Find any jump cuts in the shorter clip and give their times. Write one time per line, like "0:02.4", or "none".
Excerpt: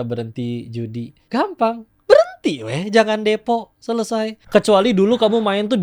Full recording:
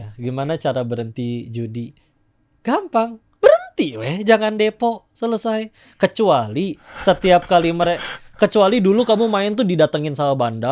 0:01.2
0:04.4